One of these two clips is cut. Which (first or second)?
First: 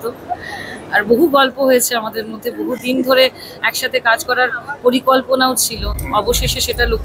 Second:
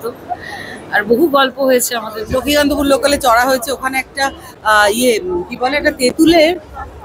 second